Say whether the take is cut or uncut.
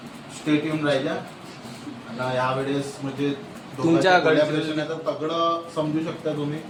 uncut